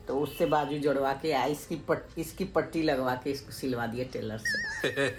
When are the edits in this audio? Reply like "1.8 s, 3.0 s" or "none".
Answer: none